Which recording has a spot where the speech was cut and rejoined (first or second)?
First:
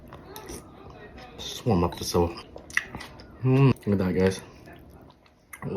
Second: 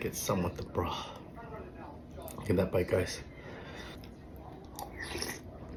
first